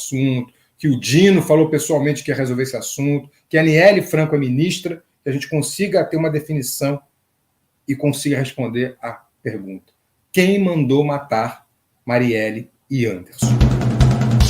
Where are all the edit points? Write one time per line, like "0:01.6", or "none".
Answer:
0:13.3